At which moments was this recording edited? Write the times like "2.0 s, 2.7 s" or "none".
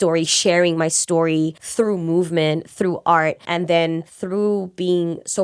1.6 s, 3.9 s